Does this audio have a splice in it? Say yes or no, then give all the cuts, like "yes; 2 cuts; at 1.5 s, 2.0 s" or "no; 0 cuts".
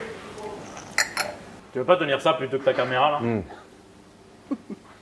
yes; 1 cut; at 1.6 s